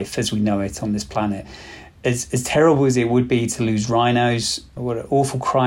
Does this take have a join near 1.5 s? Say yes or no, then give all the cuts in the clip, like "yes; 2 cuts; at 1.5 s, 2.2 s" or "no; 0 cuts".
yes; 2 cuts; at 1.5 s, 4.7 s